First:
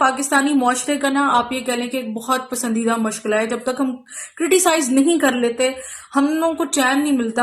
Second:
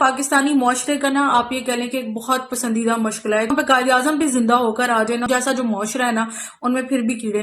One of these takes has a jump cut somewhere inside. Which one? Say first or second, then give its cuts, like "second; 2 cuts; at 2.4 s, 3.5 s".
second; 2 cuts; at 3.5 s, 5.2 s